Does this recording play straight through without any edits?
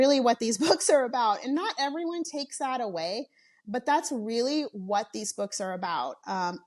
yes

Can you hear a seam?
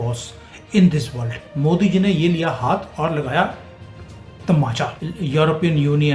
yes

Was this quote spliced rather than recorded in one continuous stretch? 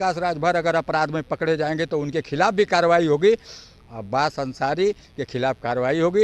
no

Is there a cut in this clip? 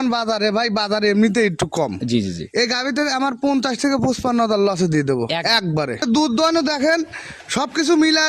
no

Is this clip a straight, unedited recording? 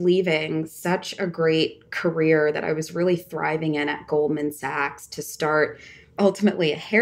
yes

